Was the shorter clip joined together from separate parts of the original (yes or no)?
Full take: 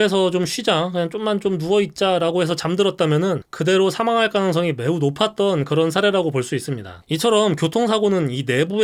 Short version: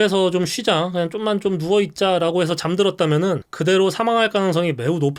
no